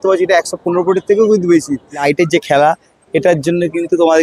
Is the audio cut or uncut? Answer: cut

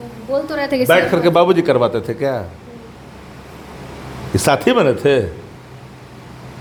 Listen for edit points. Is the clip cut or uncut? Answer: uncut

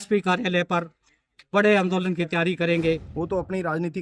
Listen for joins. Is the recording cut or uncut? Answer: cut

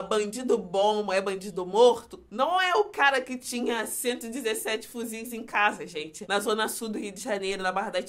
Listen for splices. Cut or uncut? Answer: cut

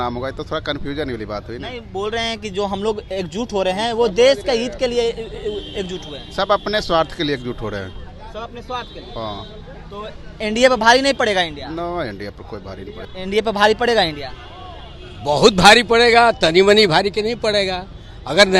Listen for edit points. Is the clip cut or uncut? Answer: cut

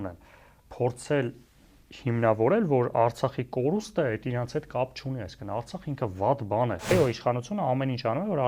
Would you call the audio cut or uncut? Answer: cut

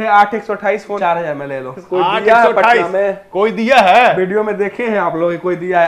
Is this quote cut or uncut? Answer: cut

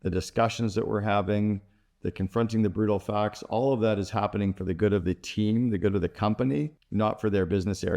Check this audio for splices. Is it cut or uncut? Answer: cut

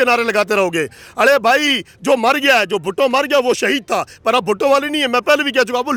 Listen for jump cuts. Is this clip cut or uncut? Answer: uncut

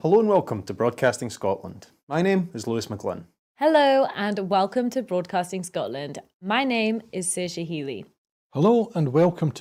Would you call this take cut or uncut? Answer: uncut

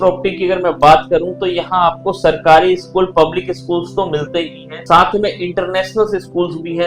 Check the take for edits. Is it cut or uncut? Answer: uncut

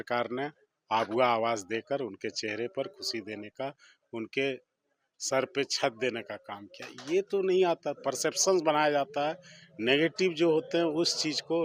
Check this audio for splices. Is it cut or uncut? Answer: uncut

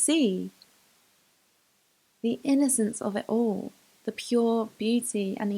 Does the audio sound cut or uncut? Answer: uncut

